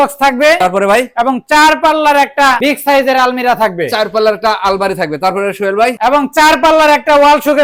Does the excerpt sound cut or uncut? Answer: uncut